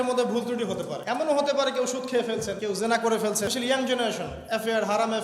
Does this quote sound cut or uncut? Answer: cut